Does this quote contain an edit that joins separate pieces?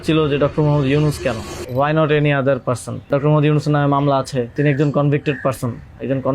yes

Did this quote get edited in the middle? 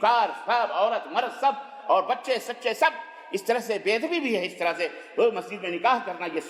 no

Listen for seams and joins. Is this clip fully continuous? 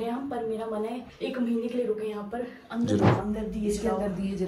no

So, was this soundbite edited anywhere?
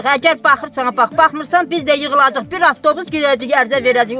no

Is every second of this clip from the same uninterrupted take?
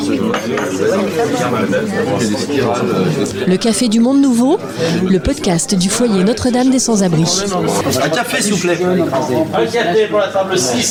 yes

